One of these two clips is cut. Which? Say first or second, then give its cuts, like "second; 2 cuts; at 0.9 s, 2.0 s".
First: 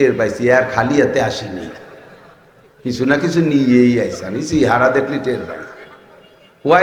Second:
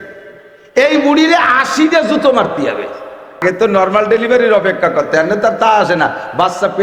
second; 1 cut; at 3.4 s